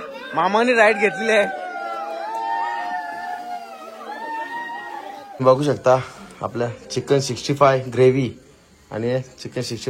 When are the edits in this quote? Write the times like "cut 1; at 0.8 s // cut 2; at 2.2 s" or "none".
cut 1; at 5.3 s